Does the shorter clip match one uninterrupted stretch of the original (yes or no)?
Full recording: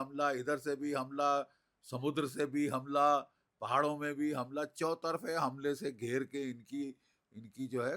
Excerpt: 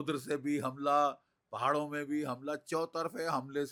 yes